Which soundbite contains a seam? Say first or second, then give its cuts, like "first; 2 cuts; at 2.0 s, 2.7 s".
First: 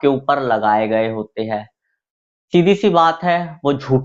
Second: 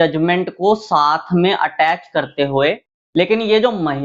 second; 1 cut; at 2.9 s